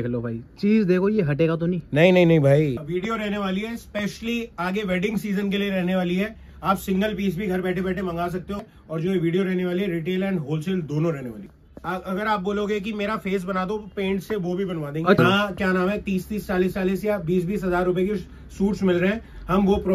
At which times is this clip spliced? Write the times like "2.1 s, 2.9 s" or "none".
2.8 s, 8.6 s, 11.5 s, 15.2 s